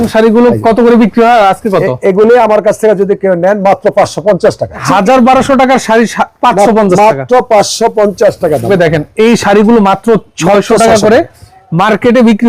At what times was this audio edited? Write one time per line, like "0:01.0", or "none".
0:04.8
0:08.6